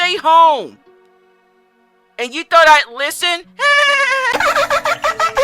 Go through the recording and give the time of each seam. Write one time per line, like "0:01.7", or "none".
0:04.3